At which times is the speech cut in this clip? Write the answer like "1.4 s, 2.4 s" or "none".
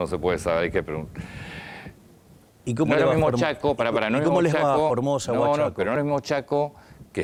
none